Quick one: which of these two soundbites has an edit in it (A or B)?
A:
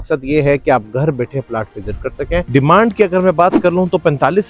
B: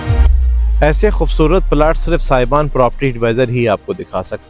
A